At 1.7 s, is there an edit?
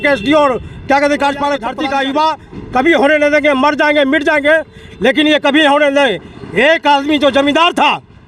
yes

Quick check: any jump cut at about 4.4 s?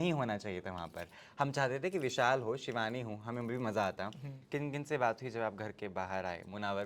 yes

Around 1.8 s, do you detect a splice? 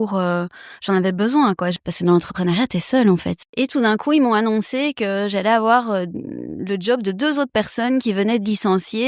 yes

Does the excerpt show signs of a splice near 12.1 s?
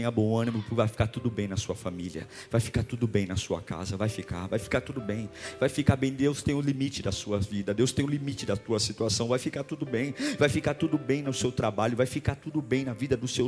no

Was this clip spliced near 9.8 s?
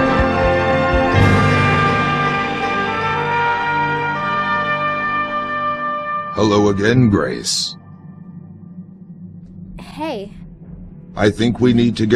no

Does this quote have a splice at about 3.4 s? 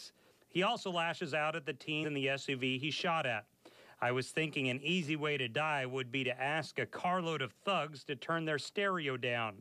no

